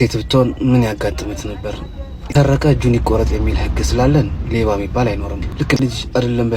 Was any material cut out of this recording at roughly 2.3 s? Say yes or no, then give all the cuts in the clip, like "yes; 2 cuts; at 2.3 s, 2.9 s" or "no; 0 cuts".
yes; 2 cuts; at 2.3 s, 5.8 s